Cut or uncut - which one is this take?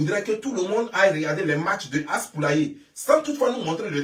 uncut